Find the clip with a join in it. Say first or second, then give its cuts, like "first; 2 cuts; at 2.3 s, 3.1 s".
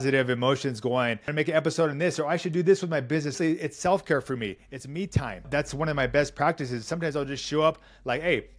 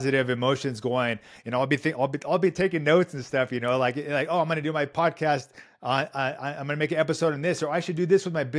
first; 3 cuts; at 1.2 s, 3.4 s, 5.5 s